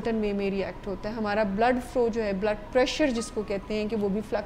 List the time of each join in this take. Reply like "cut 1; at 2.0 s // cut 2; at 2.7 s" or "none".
none